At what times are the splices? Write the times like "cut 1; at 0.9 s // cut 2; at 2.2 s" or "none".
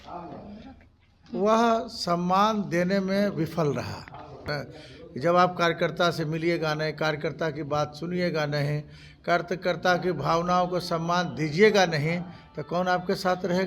cut 1; at 4.5 s